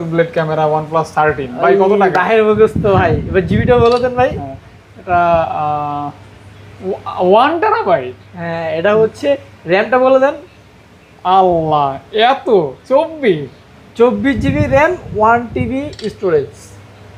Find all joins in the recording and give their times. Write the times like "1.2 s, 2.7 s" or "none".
none